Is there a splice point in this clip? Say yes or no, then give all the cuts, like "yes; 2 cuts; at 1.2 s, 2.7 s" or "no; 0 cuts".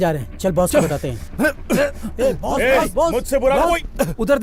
no; 0 cuts